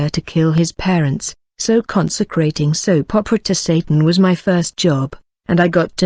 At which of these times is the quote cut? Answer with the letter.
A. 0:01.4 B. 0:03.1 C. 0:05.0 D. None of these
A